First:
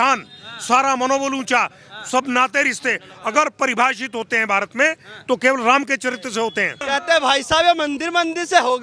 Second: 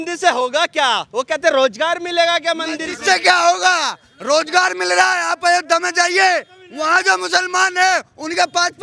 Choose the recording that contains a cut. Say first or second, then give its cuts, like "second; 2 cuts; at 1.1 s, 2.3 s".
first; 1 cut; at 6.8 s